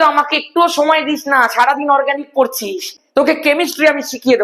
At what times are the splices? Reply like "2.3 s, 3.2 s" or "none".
2.8 s